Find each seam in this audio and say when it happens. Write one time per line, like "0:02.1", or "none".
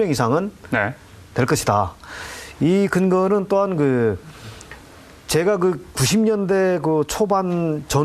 none